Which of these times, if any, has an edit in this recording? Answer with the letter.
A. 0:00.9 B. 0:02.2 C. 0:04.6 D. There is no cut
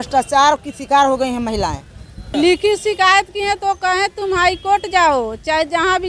B